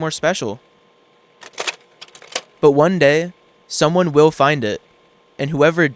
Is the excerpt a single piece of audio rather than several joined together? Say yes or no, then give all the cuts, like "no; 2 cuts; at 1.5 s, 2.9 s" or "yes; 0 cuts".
yes; 0 cuts